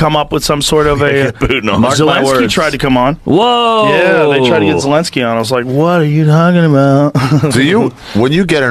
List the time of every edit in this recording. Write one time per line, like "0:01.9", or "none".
none